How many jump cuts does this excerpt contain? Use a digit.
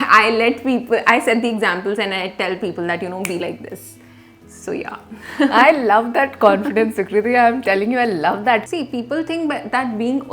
1